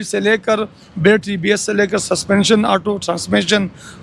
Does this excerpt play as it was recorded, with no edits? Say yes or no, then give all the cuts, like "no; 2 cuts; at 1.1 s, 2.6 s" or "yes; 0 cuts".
yes; 0 cuts